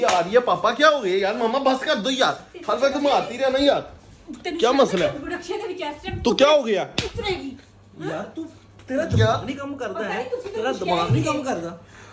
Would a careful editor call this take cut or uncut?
uncut